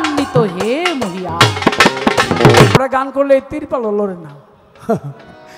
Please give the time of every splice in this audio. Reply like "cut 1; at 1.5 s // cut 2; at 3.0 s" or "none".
cut 1; at 2.8 s